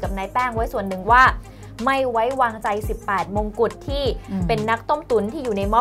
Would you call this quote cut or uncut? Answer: uncut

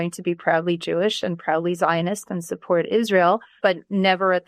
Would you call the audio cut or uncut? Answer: cut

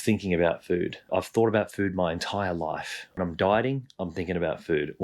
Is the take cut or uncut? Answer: cut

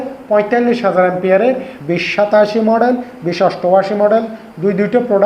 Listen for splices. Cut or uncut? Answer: cut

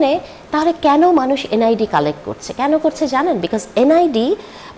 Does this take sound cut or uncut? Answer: uncut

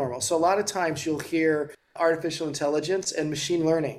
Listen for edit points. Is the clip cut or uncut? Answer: cut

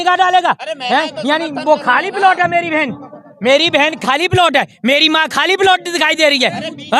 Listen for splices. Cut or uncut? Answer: uncut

